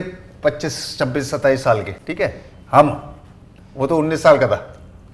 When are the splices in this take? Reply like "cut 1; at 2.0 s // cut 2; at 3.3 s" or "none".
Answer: none